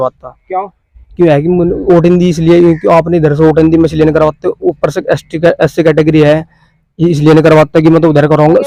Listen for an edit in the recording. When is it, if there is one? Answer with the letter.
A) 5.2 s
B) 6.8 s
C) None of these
C